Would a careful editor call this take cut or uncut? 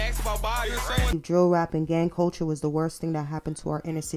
cut